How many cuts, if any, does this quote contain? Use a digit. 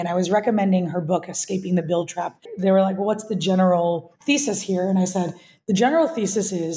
2